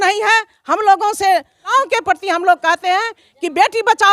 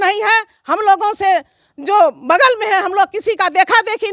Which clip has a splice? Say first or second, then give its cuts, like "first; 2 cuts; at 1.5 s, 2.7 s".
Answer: first; 1 cut; at 1.7 s